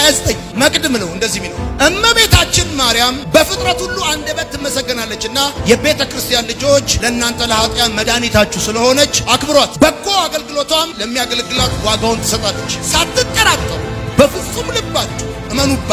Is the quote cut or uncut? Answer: uncut